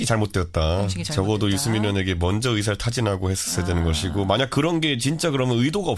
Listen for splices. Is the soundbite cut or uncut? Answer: cut